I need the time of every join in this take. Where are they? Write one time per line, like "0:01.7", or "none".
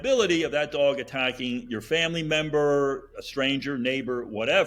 none